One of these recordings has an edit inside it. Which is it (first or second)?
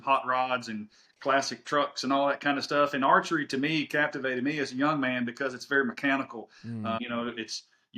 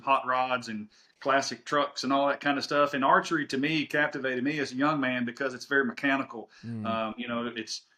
first